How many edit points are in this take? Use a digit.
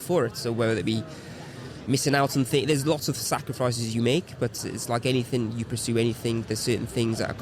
1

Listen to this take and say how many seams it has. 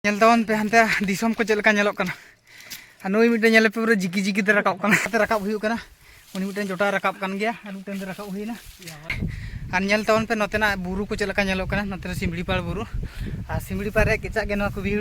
2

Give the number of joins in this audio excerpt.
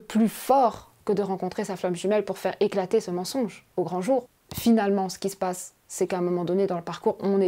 1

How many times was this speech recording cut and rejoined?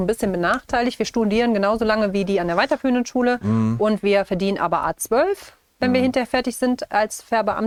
0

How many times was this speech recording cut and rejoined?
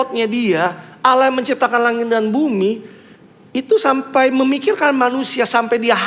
0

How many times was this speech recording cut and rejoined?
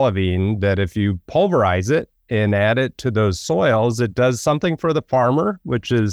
0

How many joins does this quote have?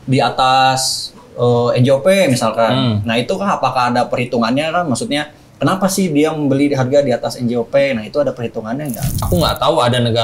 1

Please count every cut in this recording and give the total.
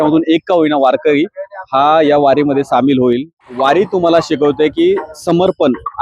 1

